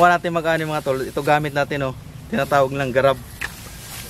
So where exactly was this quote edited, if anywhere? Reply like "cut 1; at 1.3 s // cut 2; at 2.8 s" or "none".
none